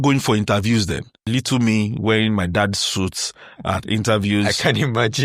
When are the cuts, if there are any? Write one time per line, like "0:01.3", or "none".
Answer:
0:01.1